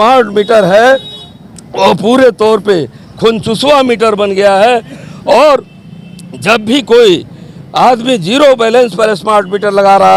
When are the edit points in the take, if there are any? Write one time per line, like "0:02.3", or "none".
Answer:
none